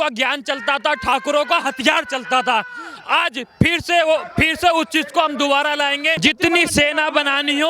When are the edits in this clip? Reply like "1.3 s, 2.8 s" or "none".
6.2 s